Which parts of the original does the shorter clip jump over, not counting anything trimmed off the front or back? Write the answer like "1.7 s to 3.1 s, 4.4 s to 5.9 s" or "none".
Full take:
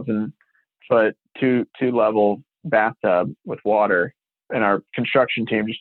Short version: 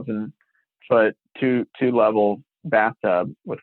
none